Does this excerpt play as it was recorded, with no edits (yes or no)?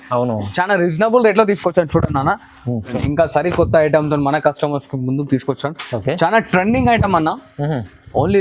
no